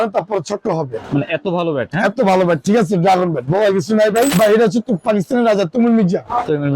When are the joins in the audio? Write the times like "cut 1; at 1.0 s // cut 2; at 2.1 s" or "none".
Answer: cut 1; at 1.0 s // cut 2; at 4.3 s